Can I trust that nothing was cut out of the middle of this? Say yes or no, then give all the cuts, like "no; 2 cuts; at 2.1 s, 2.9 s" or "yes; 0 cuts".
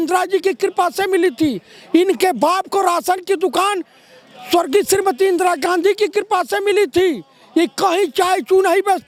yes; 0 cuts